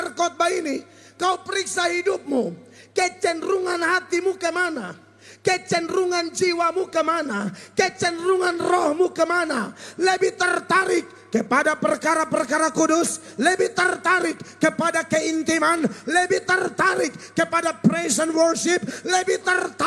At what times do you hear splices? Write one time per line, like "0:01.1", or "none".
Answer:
none